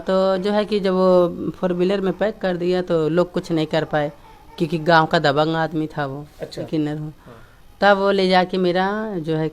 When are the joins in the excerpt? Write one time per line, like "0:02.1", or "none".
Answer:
0:06.7